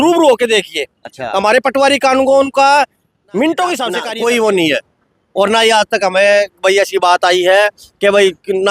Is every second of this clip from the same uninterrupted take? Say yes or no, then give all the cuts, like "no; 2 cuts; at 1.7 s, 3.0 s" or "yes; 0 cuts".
no; 1 cut; at 4.0 s